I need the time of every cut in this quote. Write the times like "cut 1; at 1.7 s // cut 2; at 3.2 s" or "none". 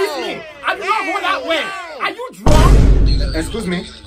cut 1; at 3.1 s